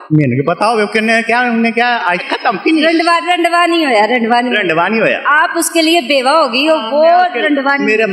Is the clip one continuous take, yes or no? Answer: no